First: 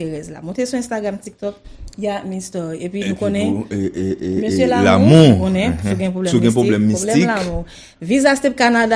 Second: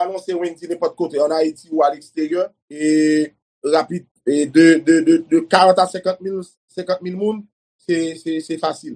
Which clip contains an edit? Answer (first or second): second